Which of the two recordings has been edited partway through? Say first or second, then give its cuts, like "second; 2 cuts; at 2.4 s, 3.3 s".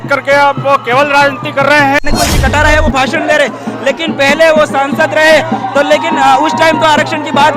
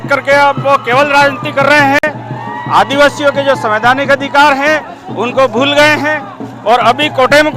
first; 1 cut; at 2.0 s